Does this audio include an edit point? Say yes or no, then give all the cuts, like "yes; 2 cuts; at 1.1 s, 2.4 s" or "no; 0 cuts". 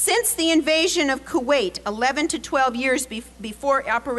no; 0 cuts